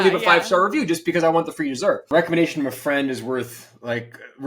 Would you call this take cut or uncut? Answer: cut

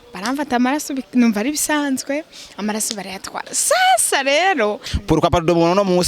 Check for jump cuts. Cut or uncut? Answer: cut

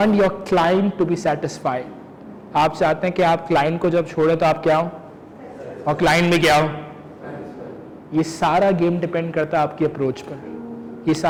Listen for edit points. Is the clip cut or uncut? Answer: uncut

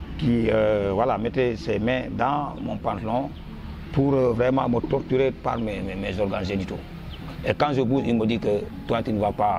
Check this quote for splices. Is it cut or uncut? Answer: uncut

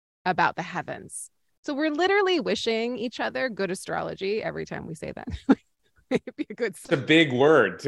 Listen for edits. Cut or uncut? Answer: cut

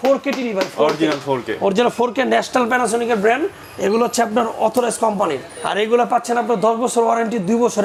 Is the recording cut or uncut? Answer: uncut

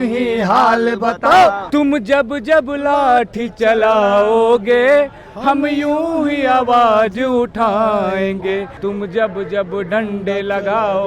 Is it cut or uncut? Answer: cut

